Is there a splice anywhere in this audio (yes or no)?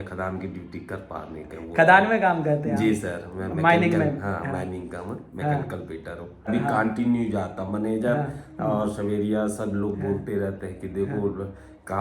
yes